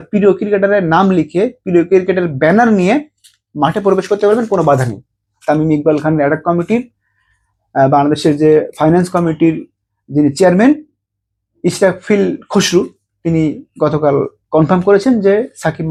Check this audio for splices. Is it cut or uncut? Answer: uncut